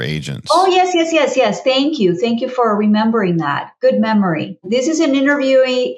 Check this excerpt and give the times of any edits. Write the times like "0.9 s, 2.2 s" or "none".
none